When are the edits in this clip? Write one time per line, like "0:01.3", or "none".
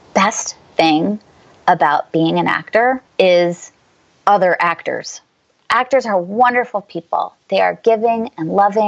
0:03.1